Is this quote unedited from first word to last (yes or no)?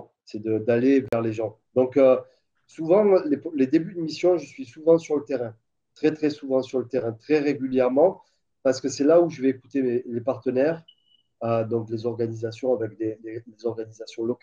yes